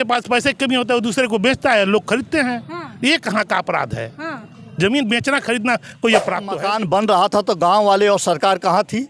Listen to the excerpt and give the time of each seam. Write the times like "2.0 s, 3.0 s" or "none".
6.6 s